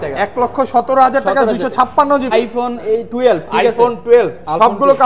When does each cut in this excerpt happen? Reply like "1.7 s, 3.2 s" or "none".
2.3 s